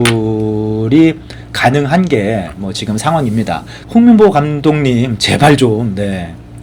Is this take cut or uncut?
cut